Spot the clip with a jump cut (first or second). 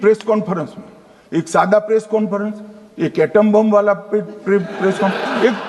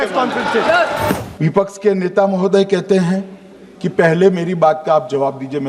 second